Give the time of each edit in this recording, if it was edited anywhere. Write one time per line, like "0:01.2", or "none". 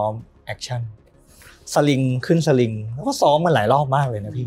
none